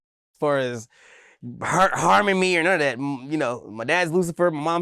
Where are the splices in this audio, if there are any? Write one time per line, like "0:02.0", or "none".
none